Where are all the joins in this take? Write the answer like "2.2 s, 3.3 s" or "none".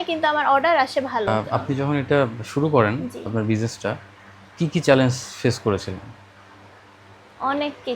1.4 s